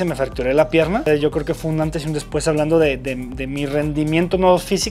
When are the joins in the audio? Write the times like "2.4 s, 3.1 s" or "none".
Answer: 1.1 s